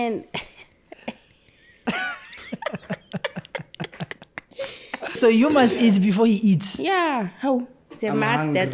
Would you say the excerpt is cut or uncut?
cut